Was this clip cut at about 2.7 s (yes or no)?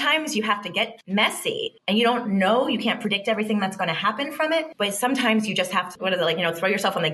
no